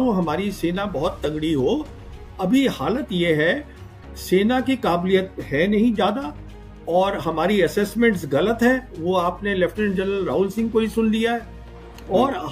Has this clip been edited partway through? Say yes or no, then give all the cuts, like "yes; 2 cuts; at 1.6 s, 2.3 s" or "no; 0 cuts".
no; 0 cuts